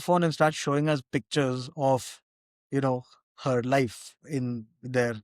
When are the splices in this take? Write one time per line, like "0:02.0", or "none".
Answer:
none